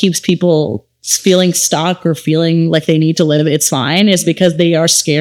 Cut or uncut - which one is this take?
uncut